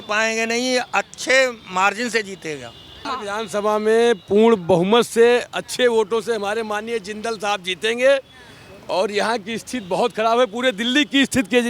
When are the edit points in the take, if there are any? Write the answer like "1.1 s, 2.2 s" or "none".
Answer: 3.1 s